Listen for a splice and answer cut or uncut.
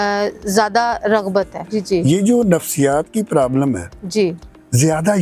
cut